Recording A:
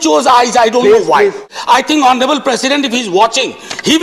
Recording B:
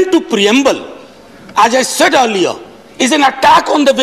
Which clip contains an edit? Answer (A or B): A